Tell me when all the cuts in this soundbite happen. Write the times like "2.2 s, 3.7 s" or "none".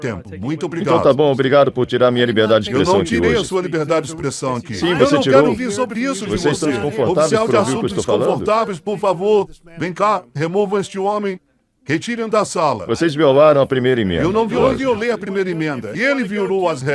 14.6 s